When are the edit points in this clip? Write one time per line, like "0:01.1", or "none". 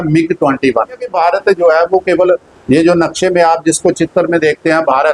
0:01.1